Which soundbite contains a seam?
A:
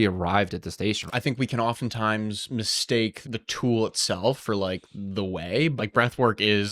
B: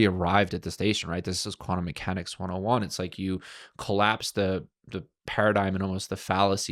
A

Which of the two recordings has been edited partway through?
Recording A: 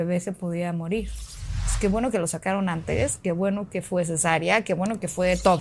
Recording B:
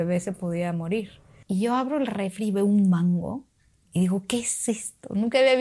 B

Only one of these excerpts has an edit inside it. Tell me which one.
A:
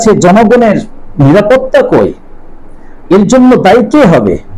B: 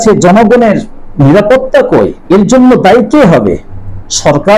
B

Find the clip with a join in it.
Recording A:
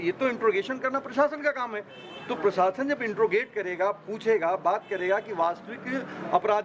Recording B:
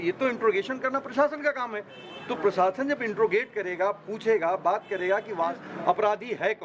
B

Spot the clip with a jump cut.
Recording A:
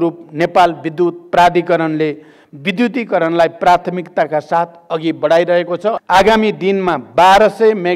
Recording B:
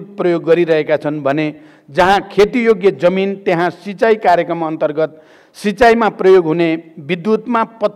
A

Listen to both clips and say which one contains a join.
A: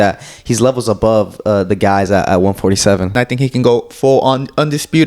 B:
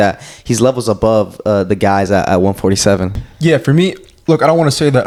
A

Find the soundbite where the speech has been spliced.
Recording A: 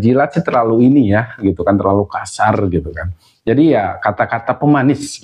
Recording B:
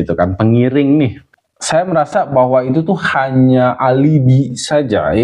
B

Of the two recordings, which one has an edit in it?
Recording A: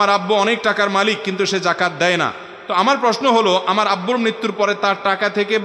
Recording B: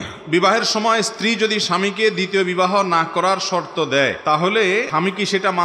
B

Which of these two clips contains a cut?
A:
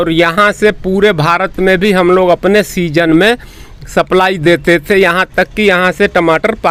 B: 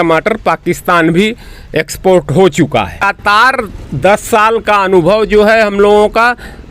B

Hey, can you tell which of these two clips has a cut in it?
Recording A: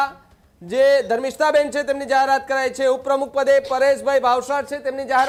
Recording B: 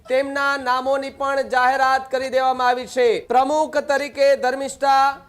B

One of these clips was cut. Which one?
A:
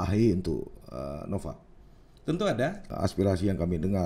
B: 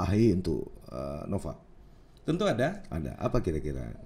A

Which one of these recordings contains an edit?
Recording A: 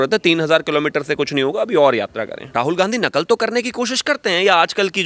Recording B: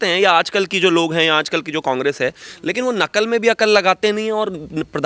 A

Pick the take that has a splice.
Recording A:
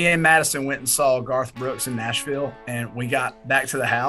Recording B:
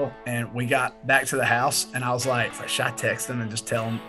B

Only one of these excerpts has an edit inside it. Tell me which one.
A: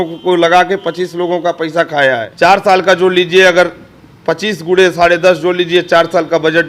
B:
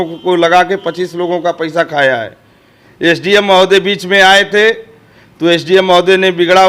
A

